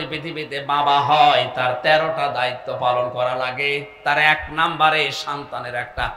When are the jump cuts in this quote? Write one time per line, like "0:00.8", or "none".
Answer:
none